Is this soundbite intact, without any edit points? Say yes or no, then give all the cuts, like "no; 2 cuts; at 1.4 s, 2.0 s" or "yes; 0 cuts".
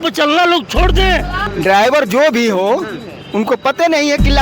no; 1 cut; at 1.4 s